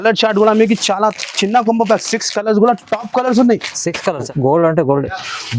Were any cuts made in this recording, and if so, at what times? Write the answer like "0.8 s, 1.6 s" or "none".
4.3 s